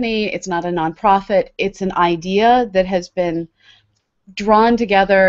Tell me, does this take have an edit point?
yes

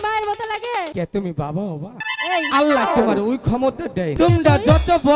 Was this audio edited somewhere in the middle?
yes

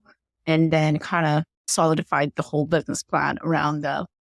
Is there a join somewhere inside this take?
yes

